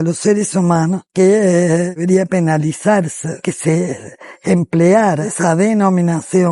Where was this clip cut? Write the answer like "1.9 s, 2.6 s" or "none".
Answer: 1.0 s, 2.2 s, 3.4 s, 5.3 s